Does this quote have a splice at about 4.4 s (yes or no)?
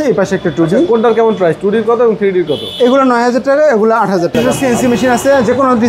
yes